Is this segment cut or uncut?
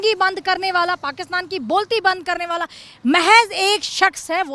uncut